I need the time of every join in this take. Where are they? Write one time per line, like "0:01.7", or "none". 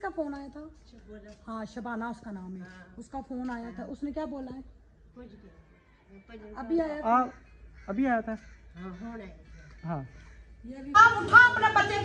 0:11.0